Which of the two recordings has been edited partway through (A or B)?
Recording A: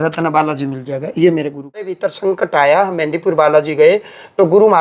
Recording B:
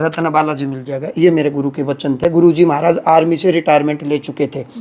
A